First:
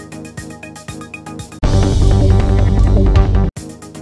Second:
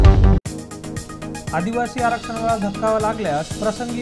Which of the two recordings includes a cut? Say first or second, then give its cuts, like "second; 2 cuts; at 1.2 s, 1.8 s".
second; 1 cut; at 1.4 s